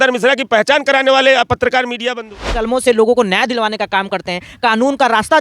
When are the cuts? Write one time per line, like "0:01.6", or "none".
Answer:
0:02.3